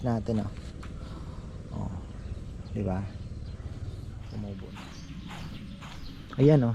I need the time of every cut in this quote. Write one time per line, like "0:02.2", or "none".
0:04.7